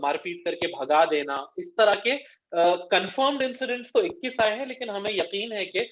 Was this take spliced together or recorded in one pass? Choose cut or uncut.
uncut